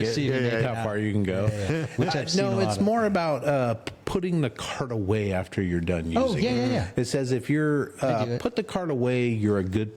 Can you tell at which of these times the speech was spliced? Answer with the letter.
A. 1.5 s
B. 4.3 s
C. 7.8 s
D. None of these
D